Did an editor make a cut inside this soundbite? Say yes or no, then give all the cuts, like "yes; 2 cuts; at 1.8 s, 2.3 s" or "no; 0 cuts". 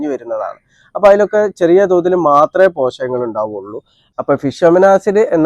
yes; 1 cut; at 4.0 s